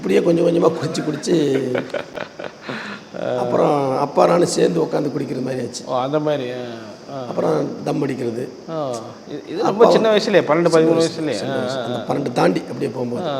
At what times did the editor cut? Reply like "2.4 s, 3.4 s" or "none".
none